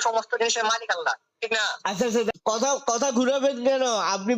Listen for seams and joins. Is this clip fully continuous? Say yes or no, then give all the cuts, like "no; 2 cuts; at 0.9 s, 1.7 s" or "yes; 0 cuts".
no; 1 cut; at 2.3 s